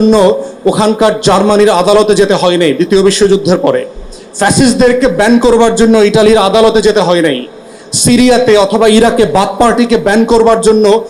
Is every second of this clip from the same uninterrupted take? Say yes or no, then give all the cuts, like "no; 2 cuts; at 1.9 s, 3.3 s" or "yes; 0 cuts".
yes; 0 cuts